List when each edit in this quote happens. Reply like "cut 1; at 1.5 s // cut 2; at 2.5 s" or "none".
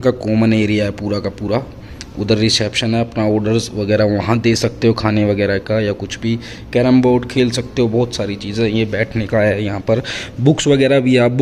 none